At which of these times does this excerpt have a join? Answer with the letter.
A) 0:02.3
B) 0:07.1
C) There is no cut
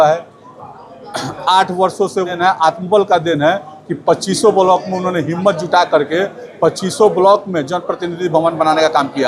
A